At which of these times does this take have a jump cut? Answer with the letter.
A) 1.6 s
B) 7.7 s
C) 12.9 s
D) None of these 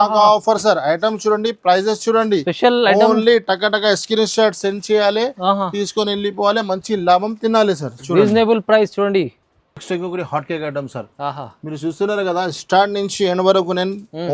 D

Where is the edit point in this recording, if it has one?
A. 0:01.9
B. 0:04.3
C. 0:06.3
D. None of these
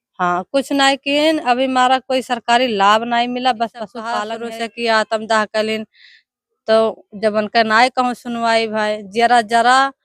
B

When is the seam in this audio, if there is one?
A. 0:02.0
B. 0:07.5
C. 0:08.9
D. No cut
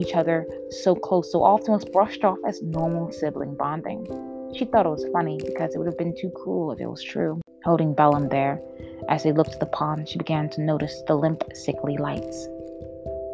B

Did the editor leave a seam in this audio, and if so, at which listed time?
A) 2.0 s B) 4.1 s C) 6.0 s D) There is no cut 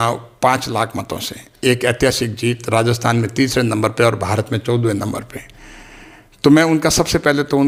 D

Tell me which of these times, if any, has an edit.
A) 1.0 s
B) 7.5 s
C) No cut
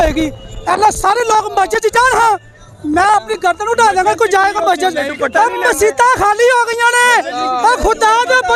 C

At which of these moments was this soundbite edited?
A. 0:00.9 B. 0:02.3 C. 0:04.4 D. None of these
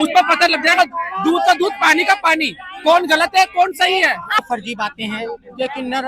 C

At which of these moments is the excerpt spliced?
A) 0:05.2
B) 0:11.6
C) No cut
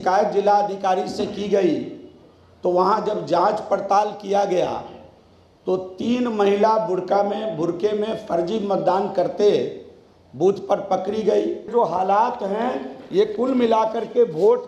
B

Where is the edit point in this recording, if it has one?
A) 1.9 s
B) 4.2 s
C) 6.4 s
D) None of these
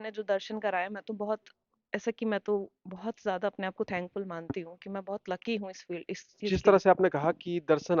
C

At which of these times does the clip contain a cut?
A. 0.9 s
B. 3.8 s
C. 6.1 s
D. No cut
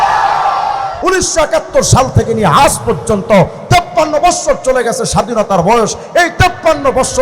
A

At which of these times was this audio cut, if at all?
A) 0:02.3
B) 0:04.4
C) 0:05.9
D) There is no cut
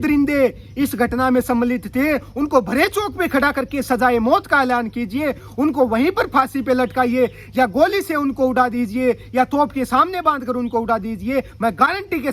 D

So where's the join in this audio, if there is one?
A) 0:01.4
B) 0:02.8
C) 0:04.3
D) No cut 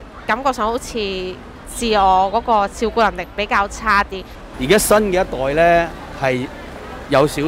C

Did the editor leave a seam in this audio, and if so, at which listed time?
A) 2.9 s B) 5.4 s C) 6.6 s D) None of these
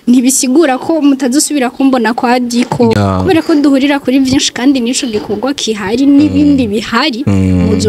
A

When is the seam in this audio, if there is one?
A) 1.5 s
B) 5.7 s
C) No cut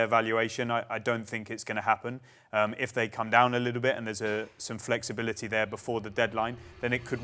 C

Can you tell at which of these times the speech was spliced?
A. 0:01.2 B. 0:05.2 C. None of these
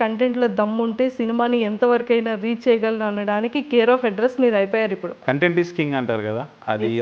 B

